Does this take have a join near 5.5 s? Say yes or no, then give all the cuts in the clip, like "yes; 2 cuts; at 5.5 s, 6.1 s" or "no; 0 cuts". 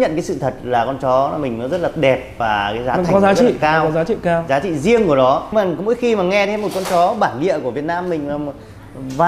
yes; 1 cut; at 5.5 s